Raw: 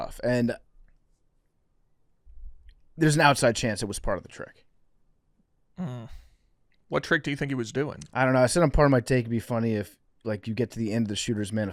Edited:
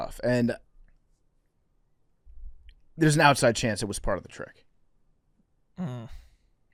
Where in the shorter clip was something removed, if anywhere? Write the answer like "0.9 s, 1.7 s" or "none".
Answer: none